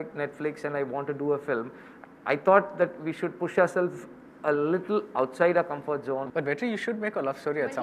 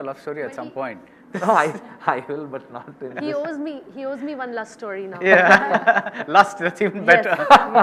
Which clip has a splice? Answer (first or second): first